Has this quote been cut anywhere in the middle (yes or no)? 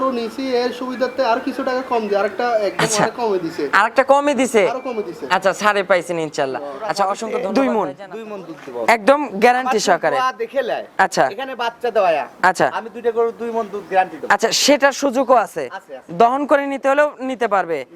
yes